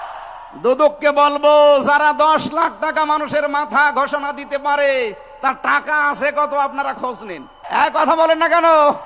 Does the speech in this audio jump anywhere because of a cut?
yes; 1 cut; at 7.5 s

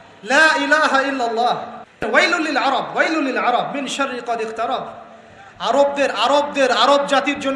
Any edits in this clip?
yes; 1 cut; at 2.0 s

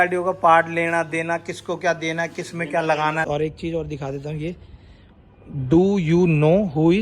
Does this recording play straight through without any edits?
no; 1 cut; at 3.3 s

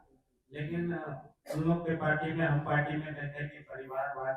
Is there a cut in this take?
no; 0 cuts

